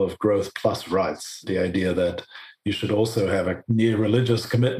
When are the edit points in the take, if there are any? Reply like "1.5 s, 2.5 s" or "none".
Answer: 3.6 s